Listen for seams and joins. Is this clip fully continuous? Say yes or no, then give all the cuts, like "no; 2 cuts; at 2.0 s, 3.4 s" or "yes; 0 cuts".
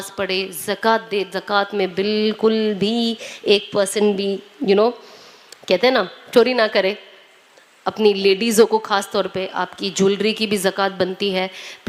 yes; 0 cuts